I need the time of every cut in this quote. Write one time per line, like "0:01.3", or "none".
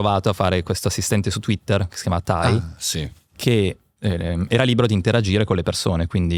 none